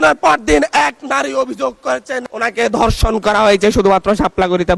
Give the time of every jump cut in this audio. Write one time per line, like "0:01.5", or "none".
none